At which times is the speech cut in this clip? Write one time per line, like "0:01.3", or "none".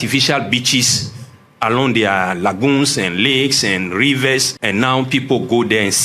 0:04.5